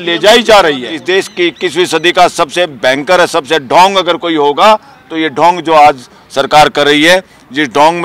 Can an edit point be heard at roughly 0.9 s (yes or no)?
yes